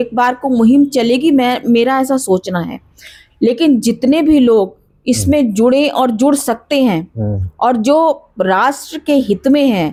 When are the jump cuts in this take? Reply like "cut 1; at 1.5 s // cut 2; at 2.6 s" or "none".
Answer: none